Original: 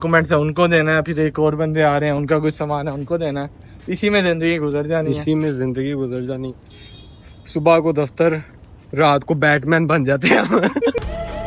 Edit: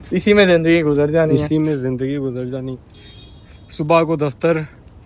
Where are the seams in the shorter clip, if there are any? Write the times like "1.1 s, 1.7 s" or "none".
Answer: none